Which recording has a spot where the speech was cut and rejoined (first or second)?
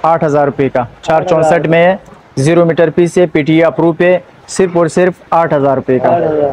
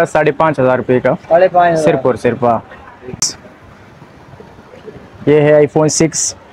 second